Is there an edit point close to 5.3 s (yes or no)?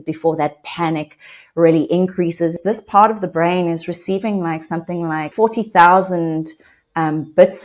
yes